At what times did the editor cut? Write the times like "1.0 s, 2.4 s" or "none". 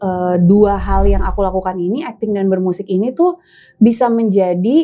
none